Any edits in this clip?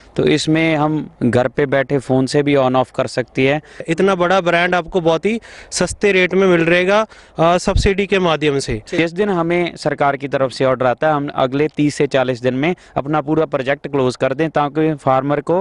yes; 2 cuts; at 3.8 s, 8.9 s

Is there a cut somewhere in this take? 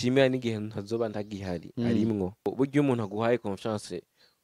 yes; 1 cut; at 2.5 s

